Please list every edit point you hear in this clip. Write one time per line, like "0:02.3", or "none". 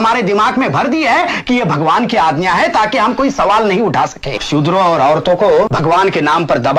0:04.4
0:05.7